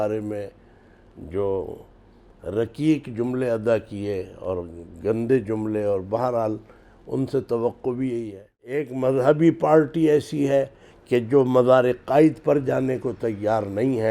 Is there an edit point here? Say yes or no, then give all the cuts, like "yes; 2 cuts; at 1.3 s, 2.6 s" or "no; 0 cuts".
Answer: yes; 1 cut; at 8.9 s